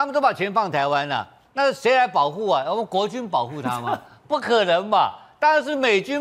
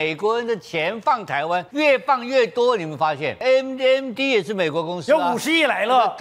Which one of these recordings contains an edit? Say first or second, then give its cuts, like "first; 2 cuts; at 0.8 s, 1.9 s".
second; 2 cuts; at 1.7 s, 3.4 s